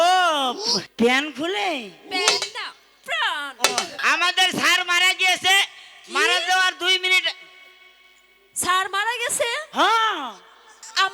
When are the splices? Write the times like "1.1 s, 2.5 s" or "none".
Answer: 0.8 s, 3.9 s